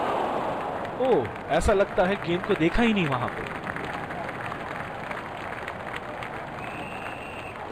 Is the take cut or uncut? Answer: uncut